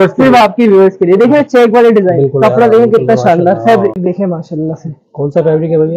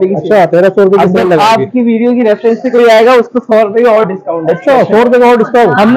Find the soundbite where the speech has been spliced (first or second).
first